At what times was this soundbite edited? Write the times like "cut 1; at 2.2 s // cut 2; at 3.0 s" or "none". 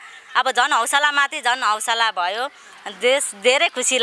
none